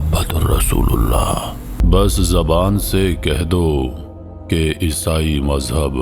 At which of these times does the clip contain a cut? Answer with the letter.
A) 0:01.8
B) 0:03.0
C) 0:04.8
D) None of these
A